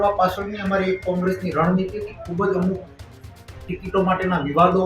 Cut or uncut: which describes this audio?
uncut